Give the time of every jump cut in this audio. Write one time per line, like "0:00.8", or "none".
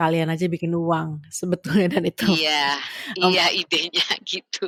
none